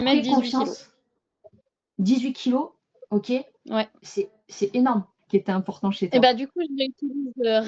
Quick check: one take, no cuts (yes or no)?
no